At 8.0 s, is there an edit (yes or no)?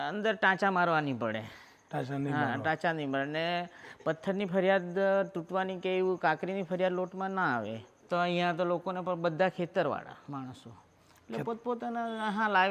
yes